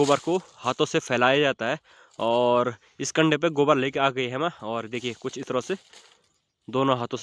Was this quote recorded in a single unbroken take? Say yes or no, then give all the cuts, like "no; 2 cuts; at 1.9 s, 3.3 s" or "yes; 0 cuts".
yes; 0 cuts